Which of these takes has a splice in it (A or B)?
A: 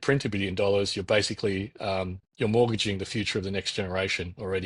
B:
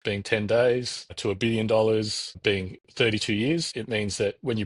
B